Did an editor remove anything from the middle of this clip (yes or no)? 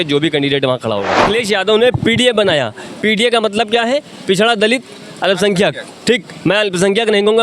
yes